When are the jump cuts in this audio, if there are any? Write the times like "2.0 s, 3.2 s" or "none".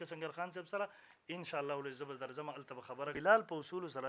3.2 s